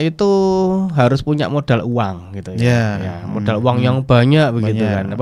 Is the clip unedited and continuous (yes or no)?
yes